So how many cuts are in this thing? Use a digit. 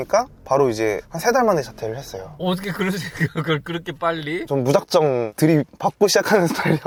0